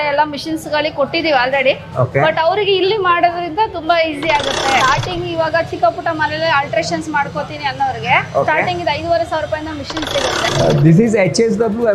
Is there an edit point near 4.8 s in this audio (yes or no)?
yes